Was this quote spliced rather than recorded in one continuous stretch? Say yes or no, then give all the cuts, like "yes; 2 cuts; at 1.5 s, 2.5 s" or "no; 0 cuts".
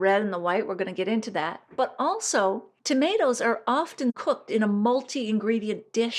yes; 1 cut; at 2.7 s